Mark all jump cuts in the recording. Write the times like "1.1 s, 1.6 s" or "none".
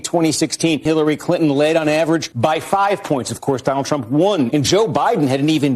0.9 s, 2.3 s, 4.5 s